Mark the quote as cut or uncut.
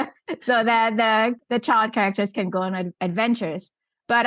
cut